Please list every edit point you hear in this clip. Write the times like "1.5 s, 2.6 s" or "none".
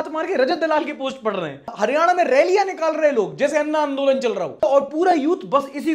none